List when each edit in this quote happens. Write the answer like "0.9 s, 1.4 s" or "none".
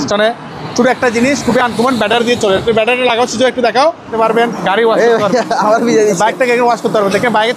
4.1 s